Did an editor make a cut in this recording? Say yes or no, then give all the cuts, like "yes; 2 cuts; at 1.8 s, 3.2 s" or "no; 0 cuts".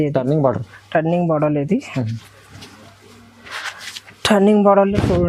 no; 0 cuts